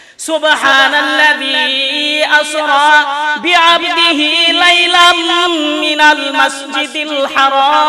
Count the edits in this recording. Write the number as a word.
zero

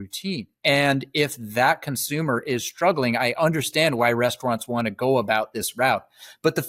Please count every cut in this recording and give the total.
zero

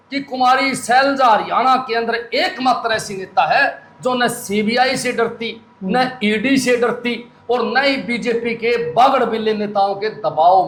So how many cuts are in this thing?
zero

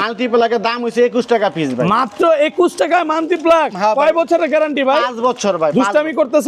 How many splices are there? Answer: zero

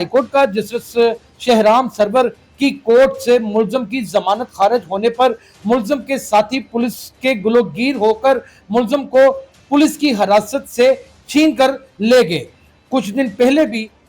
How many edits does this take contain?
one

